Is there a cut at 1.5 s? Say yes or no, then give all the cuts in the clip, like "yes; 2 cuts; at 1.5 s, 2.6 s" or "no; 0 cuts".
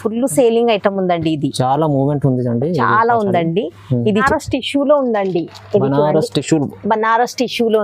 no; 1 cut; at 4.2 s